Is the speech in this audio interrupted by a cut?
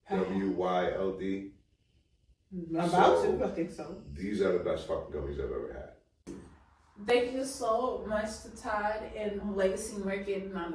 yes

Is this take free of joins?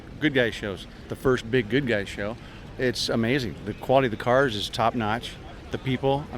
no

